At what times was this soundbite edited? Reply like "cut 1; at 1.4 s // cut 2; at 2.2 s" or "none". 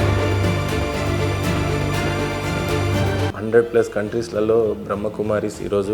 cut 1; at 3.3 s